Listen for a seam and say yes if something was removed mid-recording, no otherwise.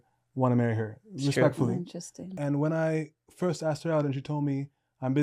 yes